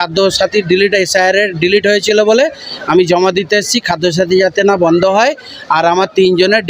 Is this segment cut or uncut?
uncut